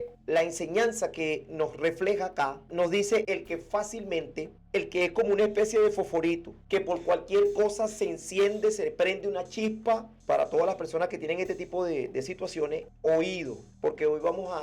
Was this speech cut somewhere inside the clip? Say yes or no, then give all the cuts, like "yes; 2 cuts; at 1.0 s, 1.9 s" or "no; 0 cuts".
yes; 1 cut; at 10.2 s